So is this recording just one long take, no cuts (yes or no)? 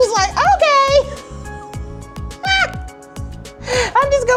yes